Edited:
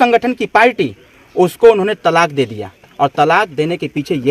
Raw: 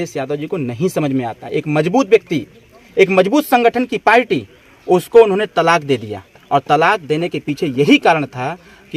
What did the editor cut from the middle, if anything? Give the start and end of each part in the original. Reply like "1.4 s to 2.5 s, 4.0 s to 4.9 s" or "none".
none

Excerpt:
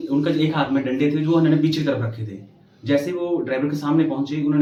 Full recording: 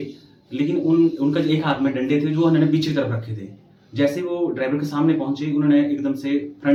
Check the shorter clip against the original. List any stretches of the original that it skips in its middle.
none

